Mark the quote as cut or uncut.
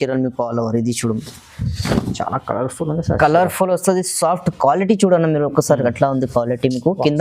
uncut